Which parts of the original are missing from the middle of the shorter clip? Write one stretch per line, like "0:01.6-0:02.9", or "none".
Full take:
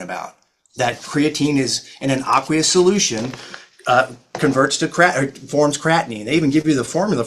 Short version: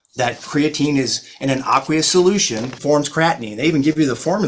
0:03.3-0:05.4